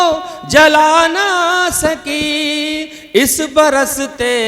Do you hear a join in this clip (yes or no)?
no